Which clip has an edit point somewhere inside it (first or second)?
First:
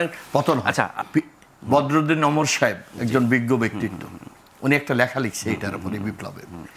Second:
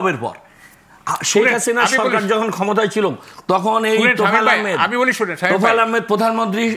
first